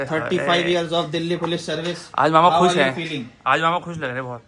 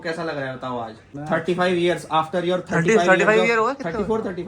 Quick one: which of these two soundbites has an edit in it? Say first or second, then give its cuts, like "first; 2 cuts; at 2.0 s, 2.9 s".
second; 1 cut; at 1.1 s